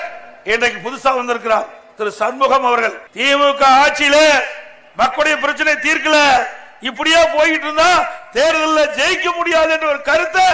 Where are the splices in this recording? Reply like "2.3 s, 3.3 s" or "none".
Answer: 3.1 s